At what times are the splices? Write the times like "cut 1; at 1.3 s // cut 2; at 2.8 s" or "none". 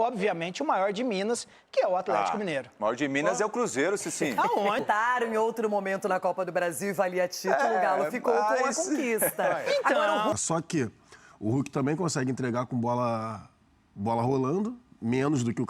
cut 1; at 4.8 s // cut 2; at 10.3 s